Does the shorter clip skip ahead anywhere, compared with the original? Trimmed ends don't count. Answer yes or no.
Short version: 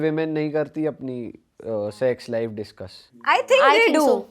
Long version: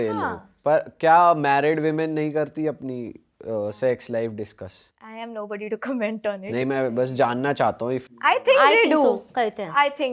yes